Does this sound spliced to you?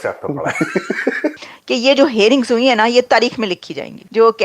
yes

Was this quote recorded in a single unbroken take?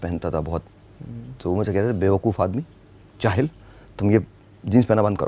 yes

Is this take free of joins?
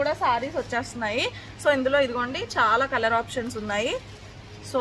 yes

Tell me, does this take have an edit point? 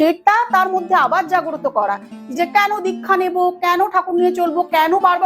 yes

